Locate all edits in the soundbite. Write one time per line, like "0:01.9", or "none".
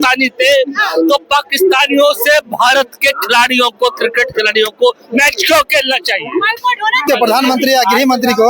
0:07.0